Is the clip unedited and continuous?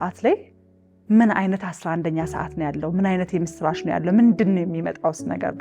yes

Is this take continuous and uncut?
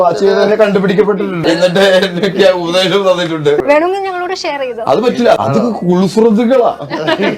no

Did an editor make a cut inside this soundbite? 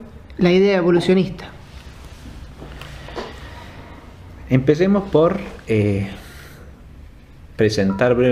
no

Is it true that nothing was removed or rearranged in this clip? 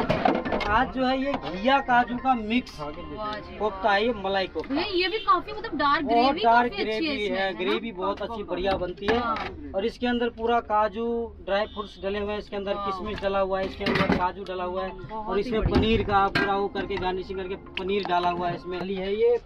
yes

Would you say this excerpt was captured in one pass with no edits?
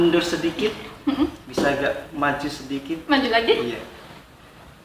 no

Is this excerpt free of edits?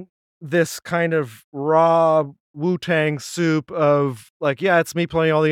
no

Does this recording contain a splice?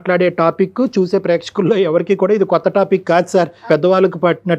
yes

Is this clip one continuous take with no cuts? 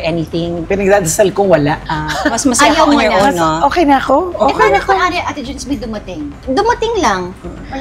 yes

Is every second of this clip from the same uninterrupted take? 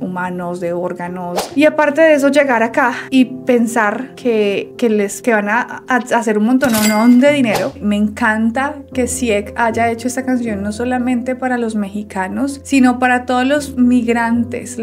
no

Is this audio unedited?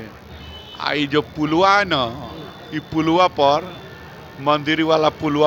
yes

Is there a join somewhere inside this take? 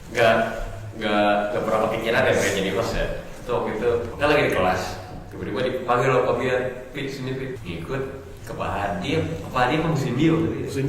yes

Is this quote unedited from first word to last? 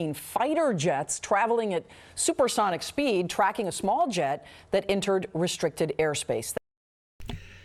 yes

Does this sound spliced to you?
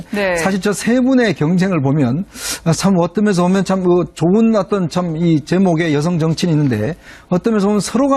yes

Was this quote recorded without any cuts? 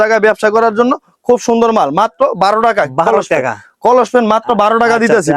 yes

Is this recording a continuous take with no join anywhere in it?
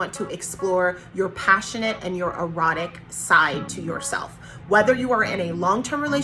yes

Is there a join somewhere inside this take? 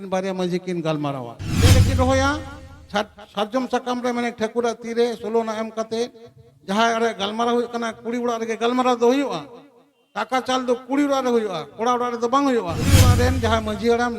yes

